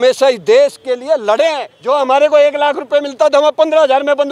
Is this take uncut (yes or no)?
no